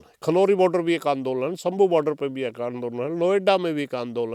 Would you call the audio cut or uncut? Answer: uncut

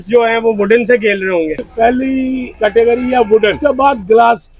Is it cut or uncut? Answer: cut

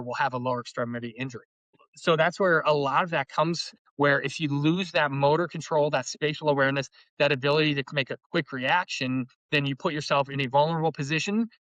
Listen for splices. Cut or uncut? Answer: cut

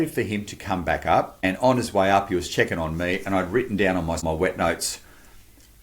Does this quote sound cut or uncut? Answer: cut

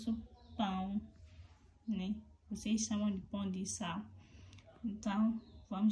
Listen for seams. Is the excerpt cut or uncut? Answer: uncut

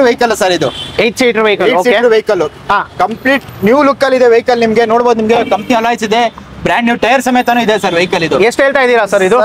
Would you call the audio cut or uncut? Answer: uncut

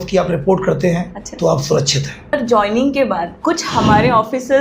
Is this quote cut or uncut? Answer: cut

